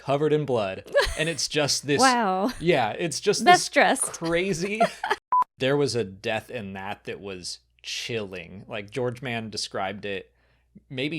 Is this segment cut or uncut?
cut